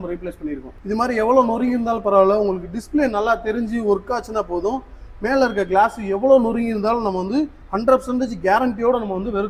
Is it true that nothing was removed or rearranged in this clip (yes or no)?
yes